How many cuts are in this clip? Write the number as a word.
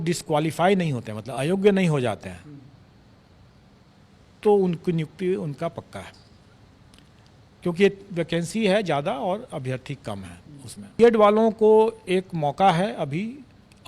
one